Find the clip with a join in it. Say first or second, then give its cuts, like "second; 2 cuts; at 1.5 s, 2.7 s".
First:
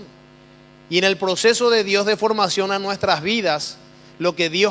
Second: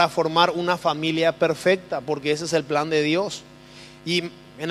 first; 1 cut; at 3.0 s